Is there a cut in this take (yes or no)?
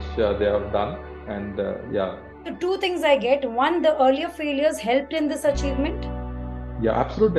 no